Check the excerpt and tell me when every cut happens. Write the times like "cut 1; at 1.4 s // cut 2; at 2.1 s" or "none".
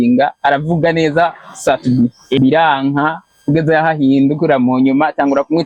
cut 1; at 2.4 s // cut 2; at 3.3 s